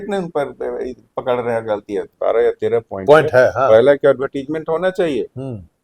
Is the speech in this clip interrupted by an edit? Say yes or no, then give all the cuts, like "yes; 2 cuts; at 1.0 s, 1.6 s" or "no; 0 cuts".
yes; 1 cut; at 2.1 s